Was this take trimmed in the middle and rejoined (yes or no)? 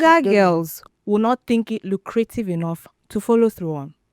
no